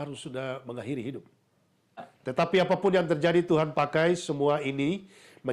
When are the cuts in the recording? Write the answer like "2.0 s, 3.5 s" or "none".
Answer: 2.0 s

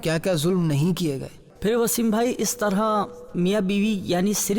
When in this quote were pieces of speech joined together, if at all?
1.4 s

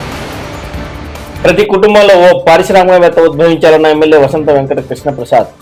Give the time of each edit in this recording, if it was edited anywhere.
none

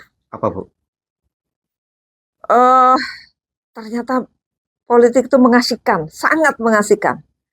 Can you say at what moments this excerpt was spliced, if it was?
none

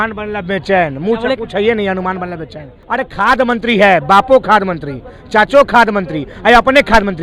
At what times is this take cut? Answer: 2.8 s

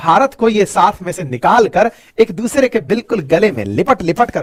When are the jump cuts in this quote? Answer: none

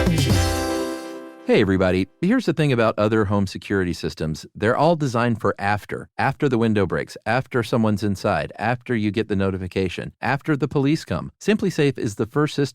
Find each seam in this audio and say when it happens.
1.2 s

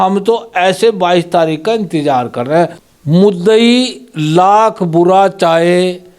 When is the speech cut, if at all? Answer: 2.8 s

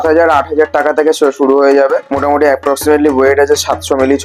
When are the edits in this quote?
none

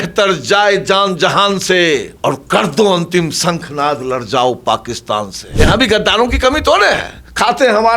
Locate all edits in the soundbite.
2.1 s, 5.4 s

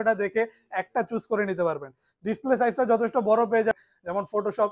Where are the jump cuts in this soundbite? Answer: 3.7 s

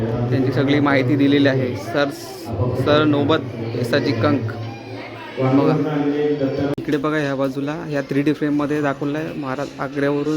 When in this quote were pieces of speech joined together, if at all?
6.7 s

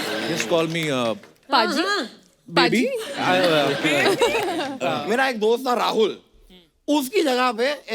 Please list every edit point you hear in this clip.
4.8 s

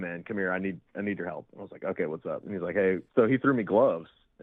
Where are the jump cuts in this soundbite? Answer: 3.1 s

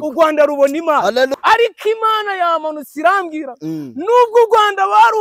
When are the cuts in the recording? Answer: 1.3 s

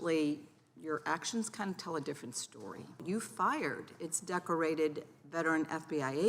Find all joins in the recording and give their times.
3.0 s

